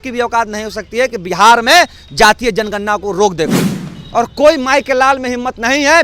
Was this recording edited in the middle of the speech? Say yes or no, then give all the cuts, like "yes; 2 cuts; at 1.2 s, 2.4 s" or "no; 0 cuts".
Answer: yes; 1 cut; at 4.0 s